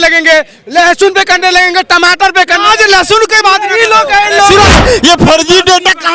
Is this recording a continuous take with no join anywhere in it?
no; 1 cut; at 4.8 s

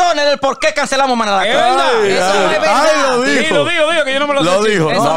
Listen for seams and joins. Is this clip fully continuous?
yes; 0 cuts

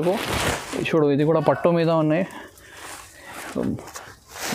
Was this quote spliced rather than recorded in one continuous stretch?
no; 0 cuts

